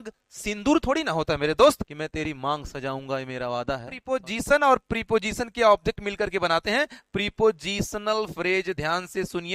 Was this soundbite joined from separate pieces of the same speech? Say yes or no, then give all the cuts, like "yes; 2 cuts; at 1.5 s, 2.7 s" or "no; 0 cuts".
yes; 2 cuts; at 1.9 s, 4.2 s